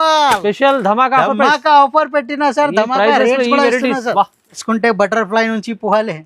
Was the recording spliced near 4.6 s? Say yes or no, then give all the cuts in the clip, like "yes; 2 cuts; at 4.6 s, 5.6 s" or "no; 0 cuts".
yes; 1 cut; at 4.6 s